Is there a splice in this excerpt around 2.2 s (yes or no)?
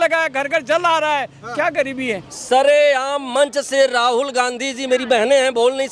yes